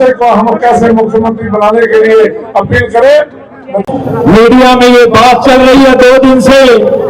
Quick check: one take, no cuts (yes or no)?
no